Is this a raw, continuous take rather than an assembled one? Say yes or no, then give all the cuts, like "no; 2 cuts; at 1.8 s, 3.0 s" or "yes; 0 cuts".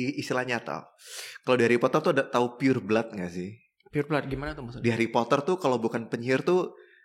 yes; 0 cuts